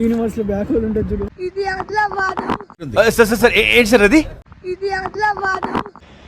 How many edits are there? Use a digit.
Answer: 1